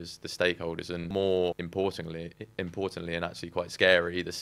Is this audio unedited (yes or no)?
no